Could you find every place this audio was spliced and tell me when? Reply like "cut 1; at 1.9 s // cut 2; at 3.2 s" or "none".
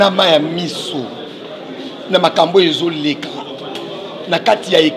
none